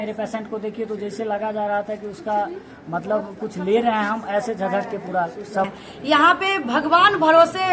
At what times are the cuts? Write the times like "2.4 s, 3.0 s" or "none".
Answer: 5.7 s